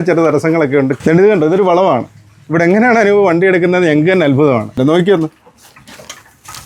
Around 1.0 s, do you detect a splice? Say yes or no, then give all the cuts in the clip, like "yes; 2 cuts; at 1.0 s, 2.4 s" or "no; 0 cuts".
yes; 2 cuts; at 1.0 s, 4.8 s